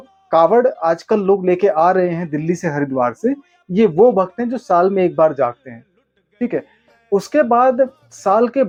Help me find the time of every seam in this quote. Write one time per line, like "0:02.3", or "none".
none